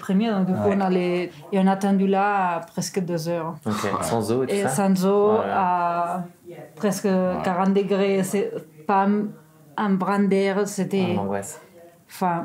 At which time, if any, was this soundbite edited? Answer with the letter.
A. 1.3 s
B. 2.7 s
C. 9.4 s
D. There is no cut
A